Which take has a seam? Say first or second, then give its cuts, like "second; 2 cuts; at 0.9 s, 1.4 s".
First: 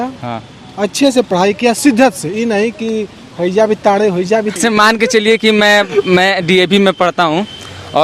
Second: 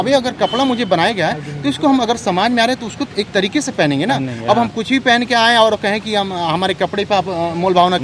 first; 1 cut; at 4.6 s